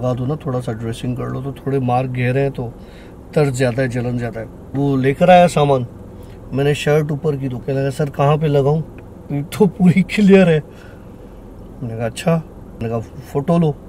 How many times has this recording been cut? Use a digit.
3